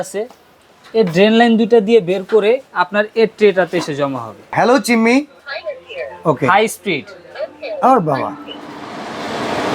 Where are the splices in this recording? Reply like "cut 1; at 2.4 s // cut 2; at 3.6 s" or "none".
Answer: cut 1; at 4.5 s